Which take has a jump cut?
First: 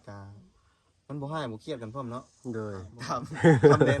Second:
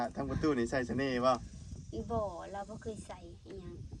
first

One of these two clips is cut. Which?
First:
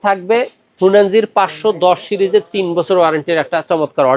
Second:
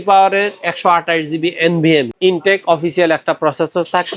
second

